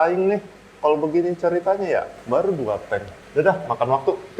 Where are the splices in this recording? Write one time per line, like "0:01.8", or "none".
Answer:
0:02.2
0:03.2